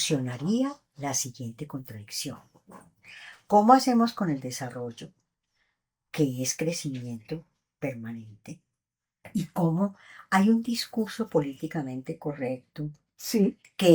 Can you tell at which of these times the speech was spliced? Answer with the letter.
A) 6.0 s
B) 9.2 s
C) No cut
B